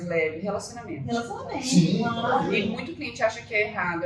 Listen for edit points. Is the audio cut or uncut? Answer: uncut